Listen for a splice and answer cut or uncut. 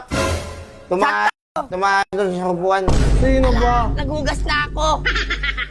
uncut